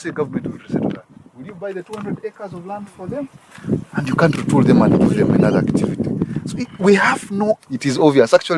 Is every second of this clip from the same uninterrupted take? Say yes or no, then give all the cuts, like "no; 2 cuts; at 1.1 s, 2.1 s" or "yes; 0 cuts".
no; 1 cut; at 7.6 s